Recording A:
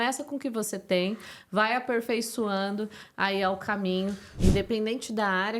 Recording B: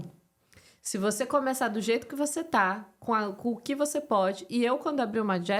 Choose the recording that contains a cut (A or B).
A